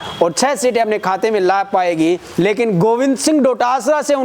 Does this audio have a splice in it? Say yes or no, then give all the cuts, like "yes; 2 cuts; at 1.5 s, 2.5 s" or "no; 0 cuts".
yes; 1 cut; at 2.3 s